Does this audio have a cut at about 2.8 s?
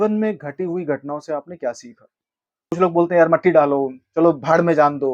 yes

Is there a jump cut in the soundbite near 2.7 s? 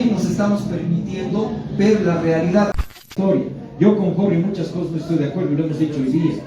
yes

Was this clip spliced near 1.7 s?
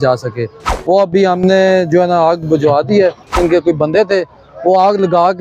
no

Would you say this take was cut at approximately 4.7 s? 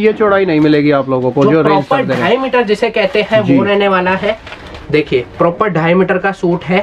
no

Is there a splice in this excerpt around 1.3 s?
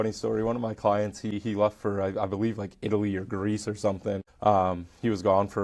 yes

